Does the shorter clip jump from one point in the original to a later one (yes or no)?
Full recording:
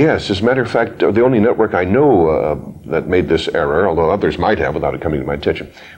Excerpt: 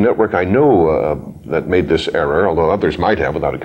no